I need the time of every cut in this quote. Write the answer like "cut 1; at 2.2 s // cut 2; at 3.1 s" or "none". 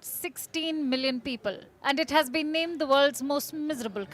cut 1; at 1.7 s